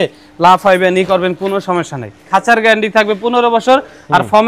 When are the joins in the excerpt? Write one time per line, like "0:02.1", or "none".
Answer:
0:02.1